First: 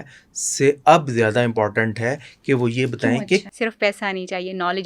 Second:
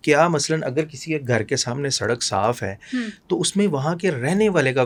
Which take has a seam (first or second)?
first